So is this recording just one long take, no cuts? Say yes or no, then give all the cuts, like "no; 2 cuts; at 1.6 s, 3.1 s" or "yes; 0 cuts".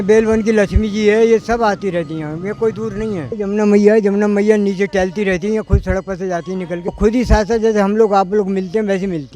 no; 2 cuts; at 3.3 s, 6.9 s